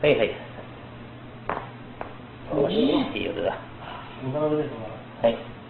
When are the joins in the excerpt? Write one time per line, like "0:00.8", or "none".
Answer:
0:01.6